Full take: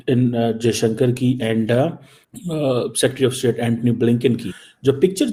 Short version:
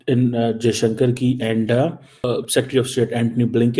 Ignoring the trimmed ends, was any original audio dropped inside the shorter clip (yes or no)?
yes